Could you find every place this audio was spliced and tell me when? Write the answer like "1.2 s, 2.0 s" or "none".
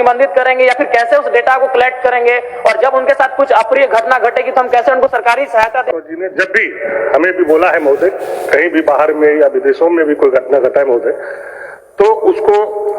5.9 s